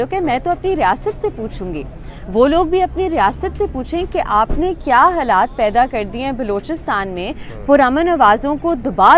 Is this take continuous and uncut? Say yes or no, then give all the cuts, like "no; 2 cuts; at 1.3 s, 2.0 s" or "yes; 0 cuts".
yes; 0 cuts